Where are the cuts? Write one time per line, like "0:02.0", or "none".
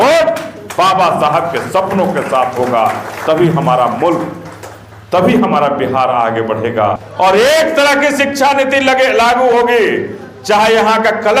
0:07.1